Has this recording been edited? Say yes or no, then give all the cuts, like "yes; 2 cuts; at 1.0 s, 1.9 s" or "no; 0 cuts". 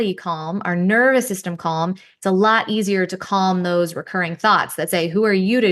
no; 0 cuts